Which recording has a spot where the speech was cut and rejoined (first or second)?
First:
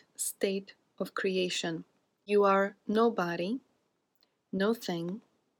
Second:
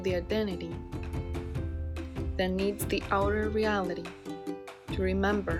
first